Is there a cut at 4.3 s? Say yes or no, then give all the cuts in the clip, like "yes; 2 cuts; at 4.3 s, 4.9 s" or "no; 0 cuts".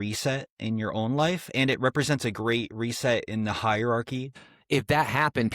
yes; 1 cut; at 4.3 s